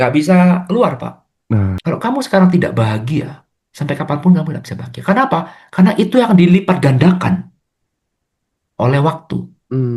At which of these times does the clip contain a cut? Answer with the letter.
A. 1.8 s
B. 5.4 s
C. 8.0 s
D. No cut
A